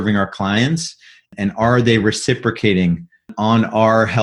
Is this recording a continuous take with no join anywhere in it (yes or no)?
yes